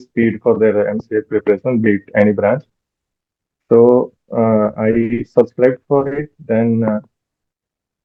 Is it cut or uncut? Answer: uncut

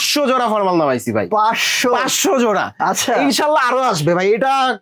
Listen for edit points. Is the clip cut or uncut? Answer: uncut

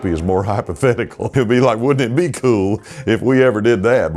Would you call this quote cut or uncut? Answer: cut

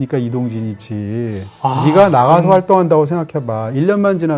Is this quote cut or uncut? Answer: uncut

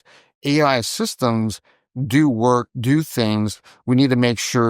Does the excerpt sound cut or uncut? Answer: uncut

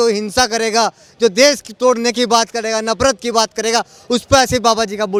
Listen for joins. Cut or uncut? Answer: uncut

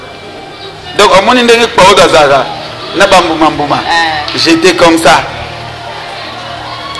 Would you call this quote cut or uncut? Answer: uncut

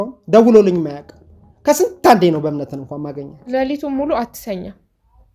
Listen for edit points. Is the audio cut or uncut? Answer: cut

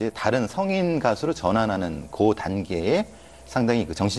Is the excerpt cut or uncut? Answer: uncut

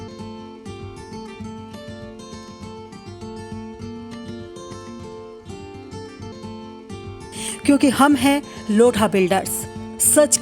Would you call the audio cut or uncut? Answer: cut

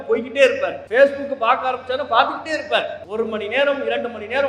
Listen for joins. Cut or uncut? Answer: cut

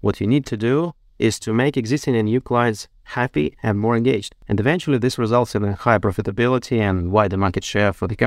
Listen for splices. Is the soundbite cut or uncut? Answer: cut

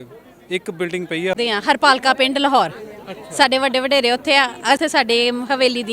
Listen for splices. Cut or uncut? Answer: cut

